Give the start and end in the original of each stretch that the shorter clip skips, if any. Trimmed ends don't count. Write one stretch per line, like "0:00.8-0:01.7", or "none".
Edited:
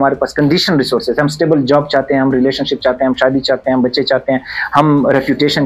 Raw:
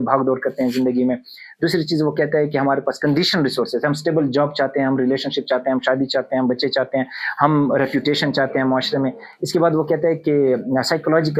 none